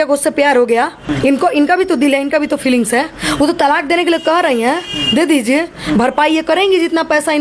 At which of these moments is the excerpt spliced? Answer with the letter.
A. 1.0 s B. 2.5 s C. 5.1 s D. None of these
A